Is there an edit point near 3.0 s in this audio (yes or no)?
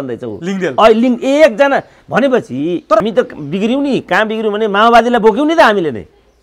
yes